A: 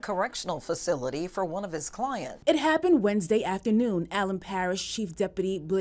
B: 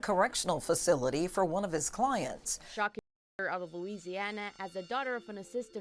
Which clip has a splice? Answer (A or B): B